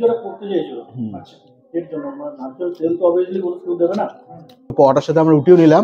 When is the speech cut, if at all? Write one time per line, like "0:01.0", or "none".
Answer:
0:04.7